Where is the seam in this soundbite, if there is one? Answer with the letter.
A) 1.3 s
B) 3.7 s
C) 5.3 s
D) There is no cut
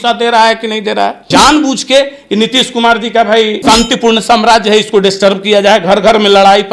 A